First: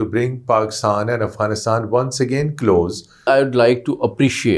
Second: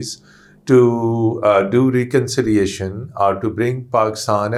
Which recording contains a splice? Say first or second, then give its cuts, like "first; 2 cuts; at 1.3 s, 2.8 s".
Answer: first; 1 cut; at 3.3 s